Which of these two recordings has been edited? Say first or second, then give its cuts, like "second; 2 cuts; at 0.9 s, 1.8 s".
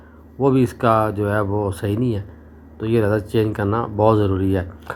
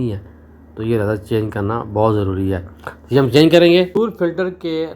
second; 1 cut; at 4.0 s